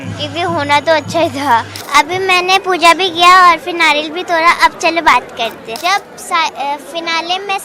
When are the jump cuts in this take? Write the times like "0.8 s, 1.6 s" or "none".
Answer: 1.8 s, 5.6 s